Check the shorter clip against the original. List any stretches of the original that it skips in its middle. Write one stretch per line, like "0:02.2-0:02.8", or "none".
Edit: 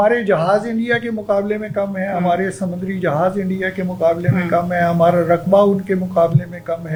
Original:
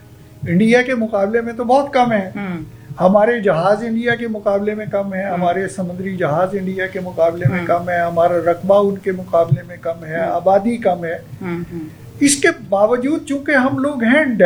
none